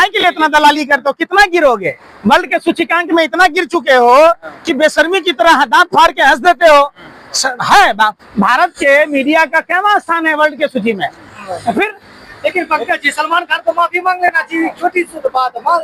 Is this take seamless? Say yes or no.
yes